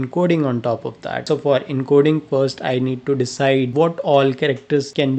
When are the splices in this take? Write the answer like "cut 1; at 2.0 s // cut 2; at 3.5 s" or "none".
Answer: none